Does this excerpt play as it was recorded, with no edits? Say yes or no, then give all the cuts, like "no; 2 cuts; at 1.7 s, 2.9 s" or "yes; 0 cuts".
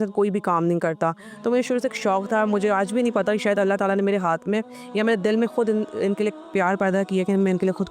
yes; 0 cuts